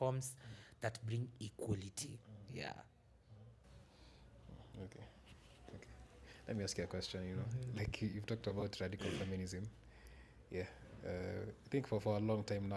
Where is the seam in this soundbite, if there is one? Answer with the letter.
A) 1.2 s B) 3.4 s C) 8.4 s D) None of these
D